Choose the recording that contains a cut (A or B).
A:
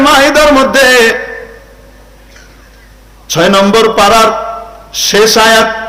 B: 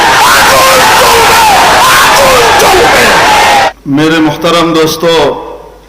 B